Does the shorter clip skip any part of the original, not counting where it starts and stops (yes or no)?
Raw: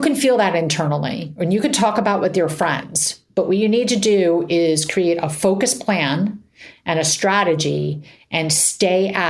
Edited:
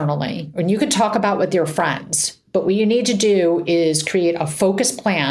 no